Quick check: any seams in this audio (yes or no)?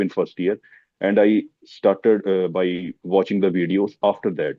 yes